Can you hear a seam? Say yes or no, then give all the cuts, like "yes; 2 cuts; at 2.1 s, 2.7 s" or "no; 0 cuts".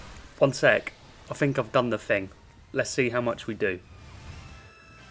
no; 0 cuts